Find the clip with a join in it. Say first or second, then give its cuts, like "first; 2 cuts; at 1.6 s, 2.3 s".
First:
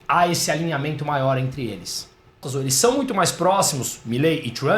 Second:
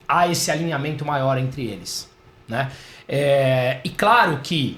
first; 1 cut; at 2.5 s